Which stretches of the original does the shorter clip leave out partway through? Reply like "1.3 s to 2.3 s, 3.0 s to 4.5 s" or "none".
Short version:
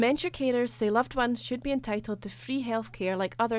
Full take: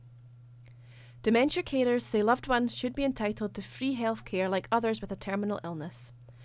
none